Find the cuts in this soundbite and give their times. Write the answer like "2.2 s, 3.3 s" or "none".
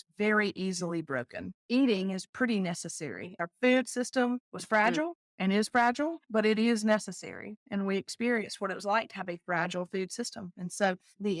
3.3 s